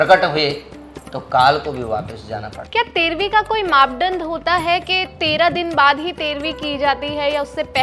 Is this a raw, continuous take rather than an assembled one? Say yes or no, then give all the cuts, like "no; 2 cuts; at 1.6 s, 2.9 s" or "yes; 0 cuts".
no; 1 cut; at 2.6 s